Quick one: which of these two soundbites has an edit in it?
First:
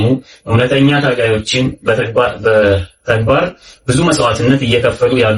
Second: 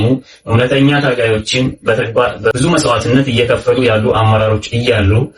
second; 1 cut; at 2.5 s

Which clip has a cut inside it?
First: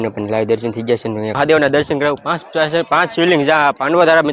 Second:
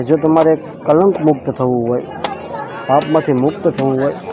first; 1 cut; at 1.4 s

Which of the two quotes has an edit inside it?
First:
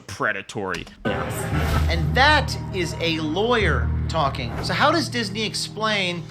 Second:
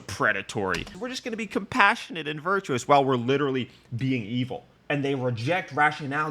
second; 1 cut; at 0.9 s

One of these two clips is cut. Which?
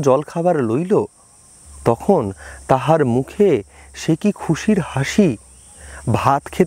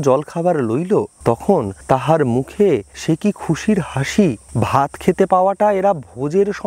second; 3 cuts; at 1.6 s, 2.9 s, 4.4 s

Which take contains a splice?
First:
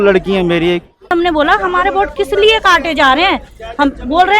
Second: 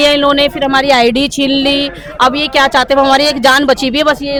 first; 1 cut; at 1.1 s

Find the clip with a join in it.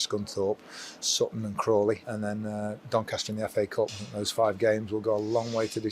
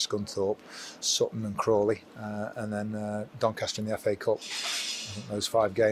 first; 2 cuts; at 2.1 s, 4.0 s

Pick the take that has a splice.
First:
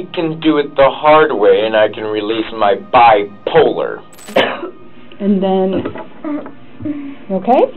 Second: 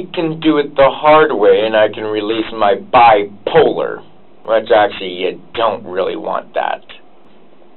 first; 1 cut; at 4.3 s

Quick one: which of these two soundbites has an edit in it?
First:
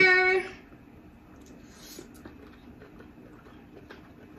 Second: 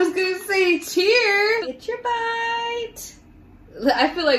second; 1 cut; at 1.7 s

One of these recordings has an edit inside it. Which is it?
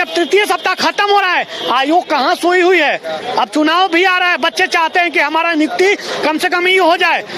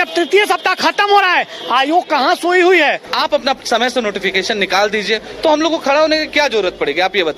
second; 1 cut; at 3.0 s

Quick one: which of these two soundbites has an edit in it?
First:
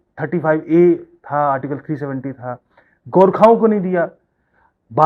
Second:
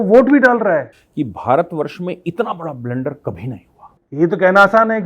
second; 2 cuts; at 1.0 s, 4.0 s

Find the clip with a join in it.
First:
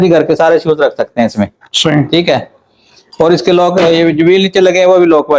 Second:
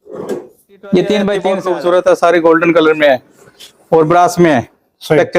second; 1 cut; at 1.5 s

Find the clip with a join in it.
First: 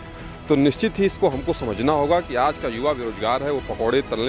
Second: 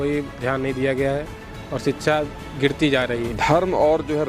second; 1 cut; at 3.3 s

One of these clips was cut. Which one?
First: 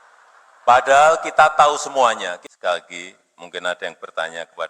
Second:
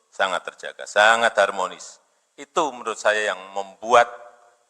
first; 1 cut; at 2.3 s

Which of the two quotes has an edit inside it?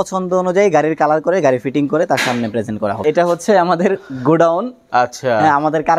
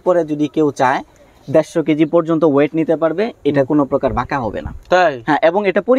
first; 1 cut; at 3.0 s

